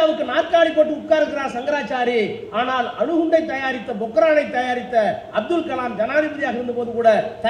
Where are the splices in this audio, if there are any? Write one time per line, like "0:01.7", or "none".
none